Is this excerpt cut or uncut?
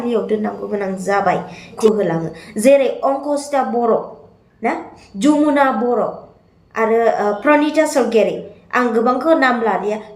cut